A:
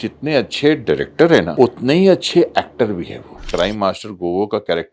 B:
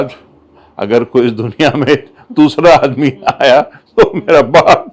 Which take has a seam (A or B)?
A